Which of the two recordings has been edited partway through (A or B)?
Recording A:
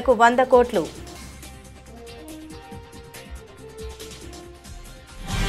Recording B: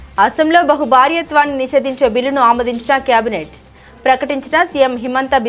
A